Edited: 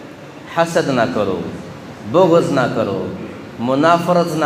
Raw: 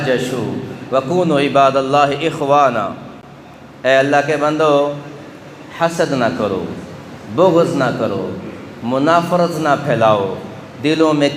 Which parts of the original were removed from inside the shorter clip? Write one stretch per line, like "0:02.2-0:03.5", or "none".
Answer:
none